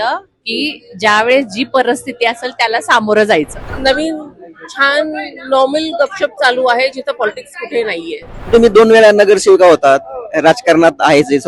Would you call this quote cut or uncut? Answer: cut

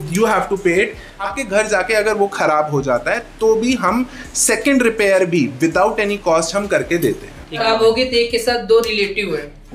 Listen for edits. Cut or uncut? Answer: cut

